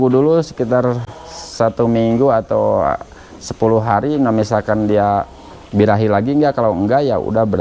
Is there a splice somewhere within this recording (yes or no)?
no